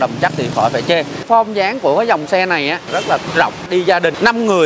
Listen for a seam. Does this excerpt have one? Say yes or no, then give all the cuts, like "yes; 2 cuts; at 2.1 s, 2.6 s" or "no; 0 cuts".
yes; 1 cut; at 1.2 s